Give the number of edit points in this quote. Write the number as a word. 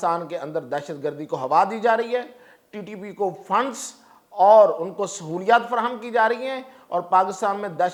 zero